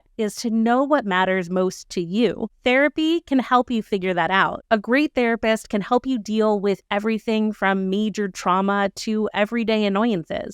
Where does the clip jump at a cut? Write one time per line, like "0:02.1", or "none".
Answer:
0:04.6